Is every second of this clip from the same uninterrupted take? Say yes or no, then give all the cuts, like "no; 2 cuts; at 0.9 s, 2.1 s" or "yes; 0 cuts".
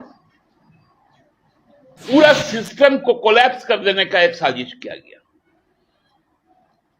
no; 1 cut; at 2.0 s